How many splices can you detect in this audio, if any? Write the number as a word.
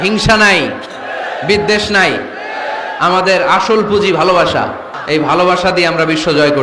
one